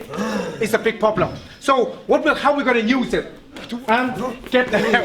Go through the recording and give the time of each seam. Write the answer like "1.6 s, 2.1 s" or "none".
3.7 s